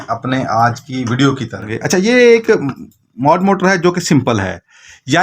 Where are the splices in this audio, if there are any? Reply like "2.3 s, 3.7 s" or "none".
1.8 s